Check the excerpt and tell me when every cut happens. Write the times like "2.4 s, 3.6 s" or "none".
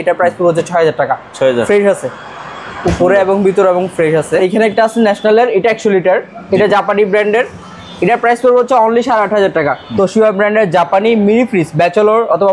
4.4 s, 9.8 s